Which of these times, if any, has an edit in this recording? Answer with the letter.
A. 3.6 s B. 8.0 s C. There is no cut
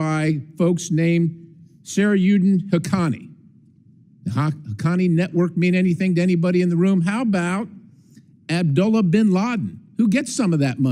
C